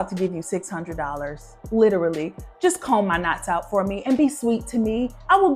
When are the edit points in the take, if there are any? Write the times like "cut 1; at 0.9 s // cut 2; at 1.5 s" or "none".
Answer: none

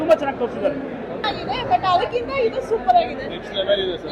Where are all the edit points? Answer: cut 1; at 1.3 s

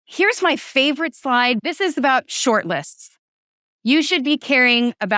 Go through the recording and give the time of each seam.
cut 1; at 1.6 s

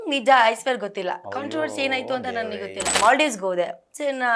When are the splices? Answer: cut 1; at 2.9 s

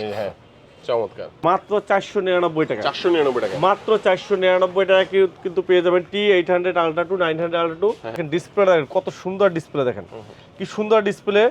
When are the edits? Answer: cut 1; at 1.2 s // cut 2; at 8.2 s

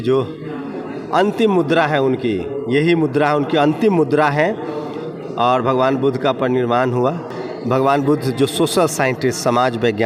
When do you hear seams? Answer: none

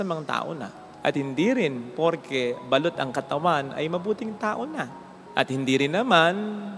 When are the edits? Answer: none

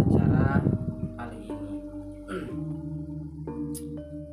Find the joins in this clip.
cut 1; at 1.0 s // cut 2; at 3.3 s

